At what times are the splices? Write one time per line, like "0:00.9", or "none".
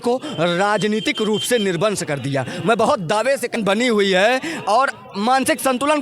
0:03.6